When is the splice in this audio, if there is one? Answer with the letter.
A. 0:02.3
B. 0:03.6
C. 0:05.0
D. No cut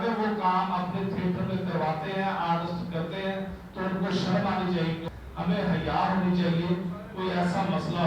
C